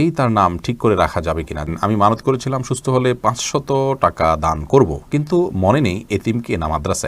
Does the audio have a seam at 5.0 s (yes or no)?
no